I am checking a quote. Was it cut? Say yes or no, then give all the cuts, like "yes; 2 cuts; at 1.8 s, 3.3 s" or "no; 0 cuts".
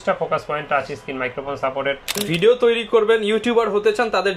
yes; 1 cut; at 2.2 s